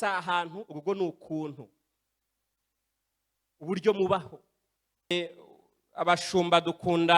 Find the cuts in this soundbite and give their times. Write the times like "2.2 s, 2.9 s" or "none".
5.1 s